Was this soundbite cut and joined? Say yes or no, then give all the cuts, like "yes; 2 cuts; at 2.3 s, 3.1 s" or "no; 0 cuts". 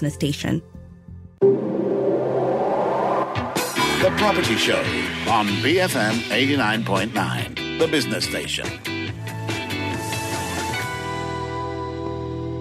yes; 1 cut; at 0.9 s